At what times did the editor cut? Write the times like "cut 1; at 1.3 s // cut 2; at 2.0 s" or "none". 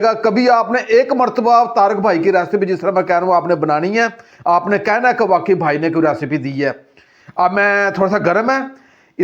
none